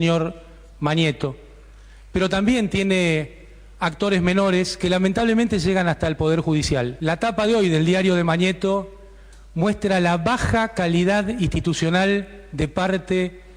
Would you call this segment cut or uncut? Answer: uncut